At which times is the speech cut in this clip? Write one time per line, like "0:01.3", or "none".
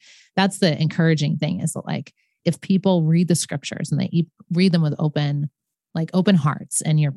none